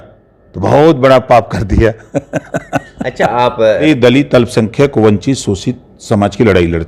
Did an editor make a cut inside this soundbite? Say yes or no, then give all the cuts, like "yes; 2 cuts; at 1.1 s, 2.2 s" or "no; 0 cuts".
yes; 1 cut; at 3.8 s